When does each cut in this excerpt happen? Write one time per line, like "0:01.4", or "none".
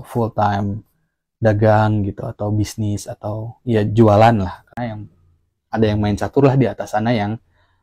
0:04.8